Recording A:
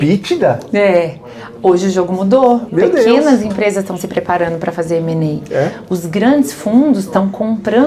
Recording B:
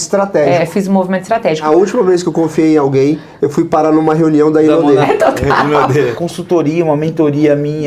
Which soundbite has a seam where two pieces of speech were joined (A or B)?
B